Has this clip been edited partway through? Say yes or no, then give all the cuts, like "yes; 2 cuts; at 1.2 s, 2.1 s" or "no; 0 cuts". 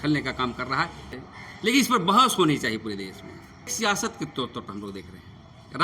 yes; 2 cuts; at 1.1 s, 3.7 s